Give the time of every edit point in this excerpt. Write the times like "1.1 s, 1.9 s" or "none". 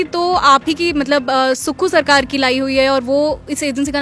none